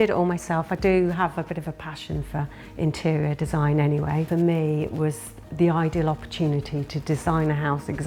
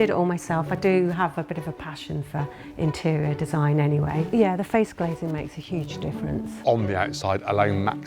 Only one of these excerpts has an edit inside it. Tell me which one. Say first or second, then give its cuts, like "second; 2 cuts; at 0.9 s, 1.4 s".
second; 1 cut; at 4.3 s